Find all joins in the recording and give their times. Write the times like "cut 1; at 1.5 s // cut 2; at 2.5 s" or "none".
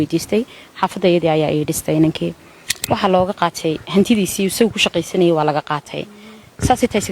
cut 1; at 2.8 s